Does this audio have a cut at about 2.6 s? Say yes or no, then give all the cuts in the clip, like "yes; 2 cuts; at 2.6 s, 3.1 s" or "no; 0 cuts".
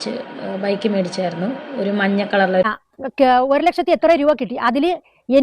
yes; 1 cut; at 2.6 s